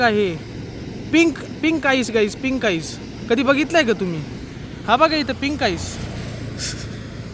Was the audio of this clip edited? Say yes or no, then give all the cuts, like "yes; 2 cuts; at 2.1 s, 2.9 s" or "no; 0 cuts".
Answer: yes; 1 cut; at 3.0 s